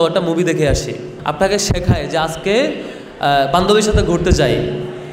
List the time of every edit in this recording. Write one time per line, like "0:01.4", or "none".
0:01.1